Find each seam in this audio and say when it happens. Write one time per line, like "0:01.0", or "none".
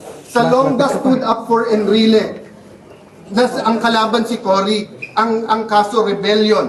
0:02.4